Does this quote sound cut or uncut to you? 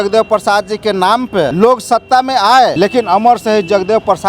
cut